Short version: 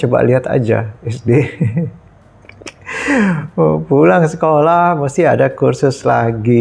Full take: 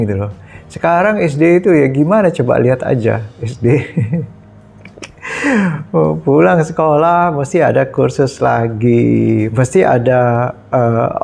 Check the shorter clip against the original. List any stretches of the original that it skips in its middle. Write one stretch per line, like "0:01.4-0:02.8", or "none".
none